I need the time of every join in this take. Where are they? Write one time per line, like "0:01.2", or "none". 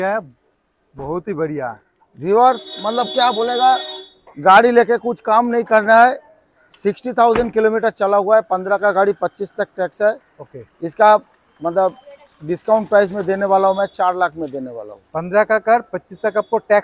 none